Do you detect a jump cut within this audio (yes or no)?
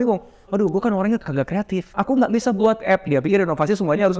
yes